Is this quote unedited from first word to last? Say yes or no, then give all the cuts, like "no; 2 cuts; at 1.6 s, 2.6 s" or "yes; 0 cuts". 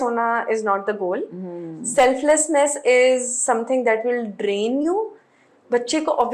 yes; 0 cuts